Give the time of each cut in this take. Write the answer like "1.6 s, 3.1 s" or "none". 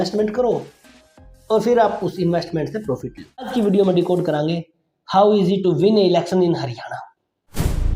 3.6 s